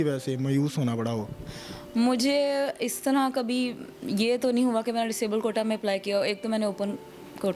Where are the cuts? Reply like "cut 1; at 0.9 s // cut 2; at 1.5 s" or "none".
none